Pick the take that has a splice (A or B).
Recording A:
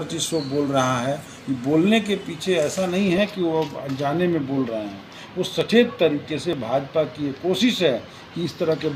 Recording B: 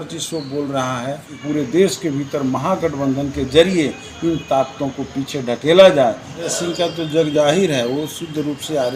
B